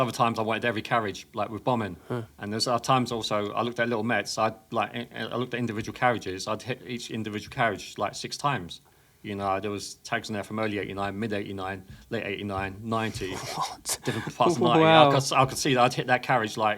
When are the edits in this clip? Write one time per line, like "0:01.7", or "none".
0:02.3